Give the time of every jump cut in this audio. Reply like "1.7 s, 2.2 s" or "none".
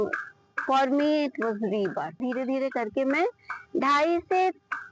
2.2 s